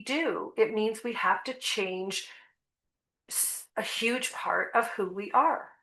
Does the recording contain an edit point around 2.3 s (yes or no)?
no